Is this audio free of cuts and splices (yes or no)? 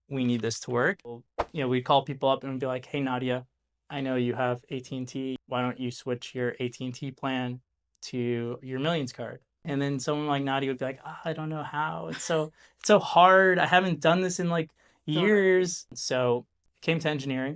no